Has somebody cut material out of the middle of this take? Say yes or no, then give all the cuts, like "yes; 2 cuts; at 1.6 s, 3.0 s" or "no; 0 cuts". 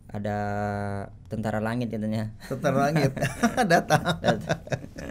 no; 0 cuts